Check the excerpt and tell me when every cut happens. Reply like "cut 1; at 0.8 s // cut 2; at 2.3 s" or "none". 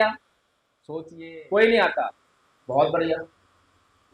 cut 1; at 1.0 s